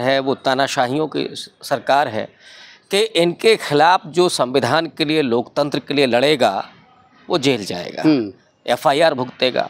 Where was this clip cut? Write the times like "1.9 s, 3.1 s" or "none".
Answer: none

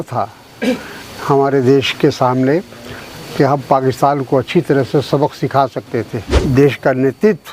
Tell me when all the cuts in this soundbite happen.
6.3 s

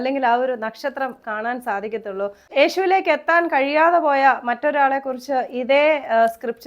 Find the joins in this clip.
2.4 s

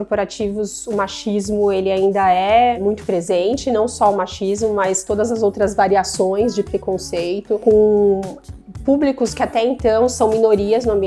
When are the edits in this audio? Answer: none

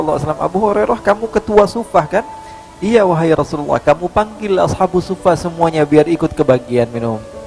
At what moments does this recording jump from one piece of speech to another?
none

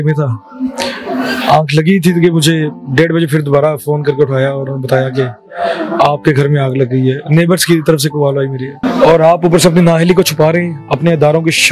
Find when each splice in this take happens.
8.8 s

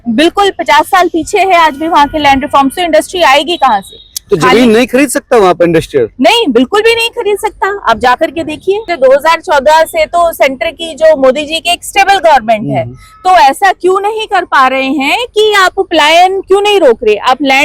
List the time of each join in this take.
8.9 s

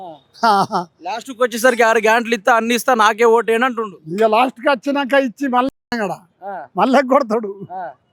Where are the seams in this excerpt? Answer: none

